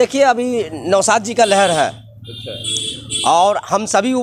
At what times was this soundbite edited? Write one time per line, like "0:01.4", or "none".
none